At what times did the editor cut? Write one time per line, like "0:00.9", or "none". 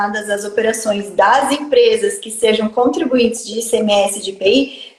none